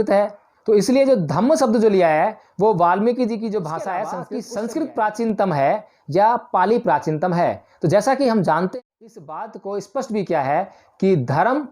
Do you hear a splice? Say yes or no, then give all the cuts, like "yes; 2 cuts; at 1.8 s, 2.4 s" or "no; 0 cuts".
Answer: yes; 2 cuts; at 4.3 s, 8.7 s